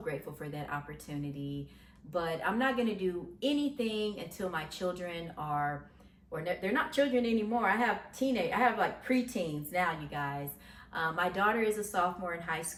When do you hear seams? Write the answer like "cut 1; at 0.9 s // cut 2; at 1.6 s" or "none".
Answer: none